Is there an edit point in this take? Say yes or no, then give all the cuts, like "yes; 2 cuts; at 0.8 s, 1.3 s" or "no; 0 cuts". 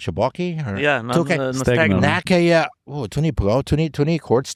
no; 0 cuts